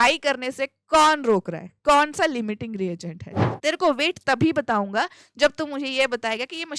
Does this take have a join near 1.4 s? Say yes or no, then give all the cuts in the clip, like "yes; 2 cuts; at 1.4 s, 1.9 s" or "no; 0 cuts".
no; 1 cut; at 3.5 s